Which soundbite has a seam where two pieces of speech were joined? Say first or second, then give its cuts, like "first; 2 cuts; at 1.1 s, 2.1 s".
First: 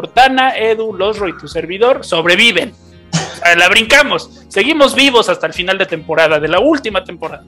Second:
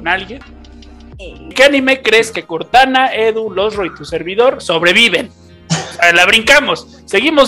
second; 1 cut; at 1.5 s